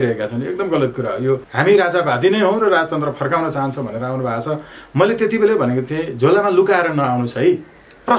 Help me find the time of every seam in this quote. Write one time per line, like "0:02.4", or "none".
0:01.5